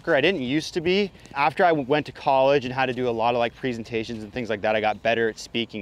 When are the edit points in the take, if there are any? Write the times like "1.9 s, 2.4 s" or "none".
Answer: 1.3 s